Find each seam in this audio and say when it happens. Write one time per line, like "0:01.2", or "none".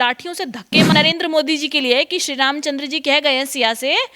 0:00.9